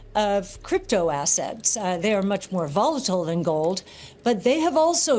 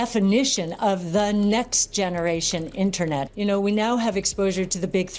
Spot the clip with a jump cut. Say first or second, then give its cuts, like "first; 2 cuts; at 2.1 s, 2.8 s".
second; 1 cut; at 3.2 s